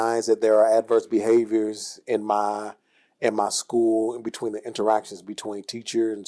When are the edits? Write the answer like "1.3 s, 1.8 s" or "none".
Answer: none